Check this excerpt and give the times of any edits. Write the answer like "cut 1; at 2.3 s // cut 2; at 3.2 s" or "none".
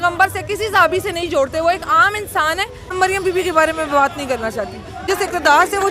cut 1; at 2.8 s // cut 2; at 5.1 s

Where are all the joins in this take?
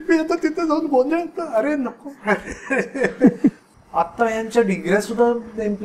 cut 1; at 3.7 s

